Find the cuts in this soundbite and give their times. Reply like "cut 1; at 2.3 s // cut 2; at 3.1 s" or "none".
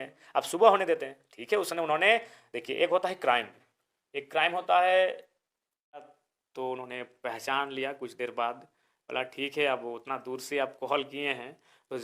cut 1; at 6.2 s